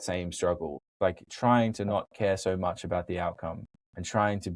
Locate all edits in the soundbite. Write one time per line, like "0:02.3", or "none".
0:00.9